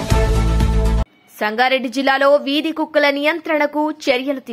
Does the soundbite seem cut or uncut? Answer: uncut